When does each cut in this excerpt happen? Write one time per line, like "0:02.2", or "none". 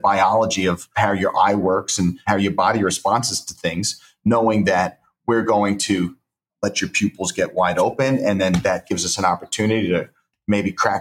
0:00.8
0:02.2
0:06.5